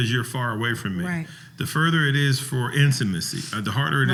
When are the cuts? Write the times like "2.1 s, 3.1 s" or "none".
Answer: none